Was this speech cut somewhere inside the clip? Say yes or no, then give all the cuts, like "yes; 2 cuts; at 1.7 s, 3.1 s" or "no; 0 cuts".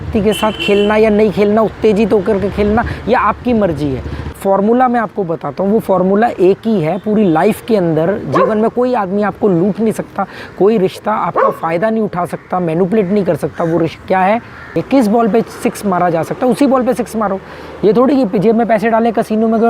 yes; 2 cuts; at 4.4 s, 14.8 s